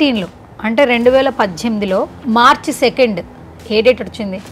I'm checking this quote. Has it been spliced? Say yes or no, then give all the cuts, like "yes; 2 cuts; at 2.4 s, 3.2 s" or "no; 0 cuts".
no; 0 cuts